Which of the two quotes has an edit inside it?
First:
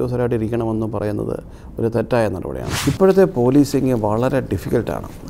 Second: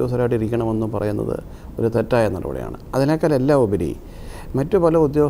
first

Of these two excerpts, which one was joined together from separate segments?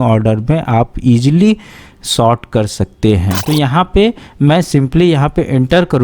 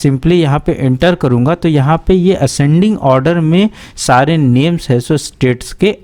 first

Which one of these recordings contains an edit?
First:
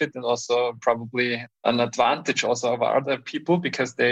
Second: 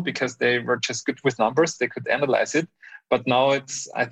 first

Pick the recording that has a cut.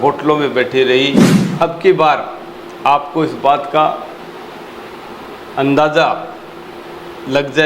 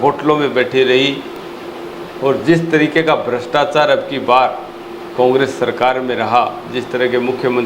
first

